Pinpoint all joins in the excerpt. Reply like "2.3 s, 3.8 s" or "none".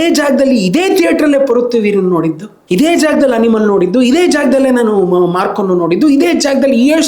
none

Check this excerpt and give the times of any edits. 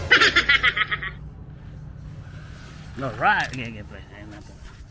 1.0 s

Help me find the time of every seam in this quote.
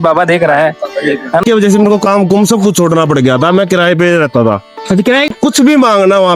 1.4 s, 5.3 s

